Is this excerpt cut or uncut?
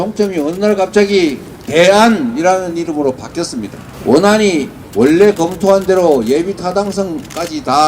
cut